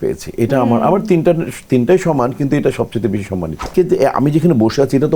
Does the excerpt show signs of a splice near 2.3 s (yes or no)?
no